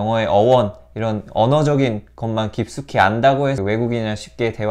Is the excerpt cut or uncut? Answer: cut